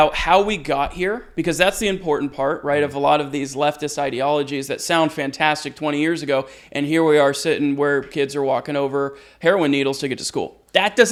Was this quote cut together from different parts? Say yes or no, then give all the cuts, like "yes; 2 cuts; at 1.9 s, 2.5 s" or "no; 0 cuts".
no; 0 cuts